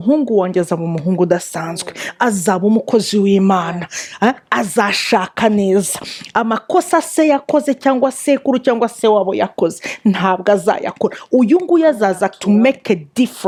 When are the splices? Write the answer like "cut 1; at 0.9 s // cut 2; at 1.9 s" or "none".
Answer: none